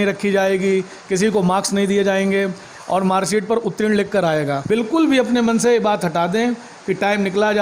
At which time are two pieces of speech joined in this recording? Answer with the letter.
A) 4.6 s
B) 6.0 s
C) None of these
A